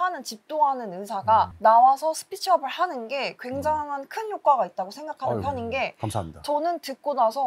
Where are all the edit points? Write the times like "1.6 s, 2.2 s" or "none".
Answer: none